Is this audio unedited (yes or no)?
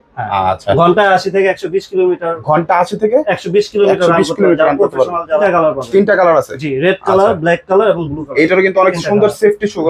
no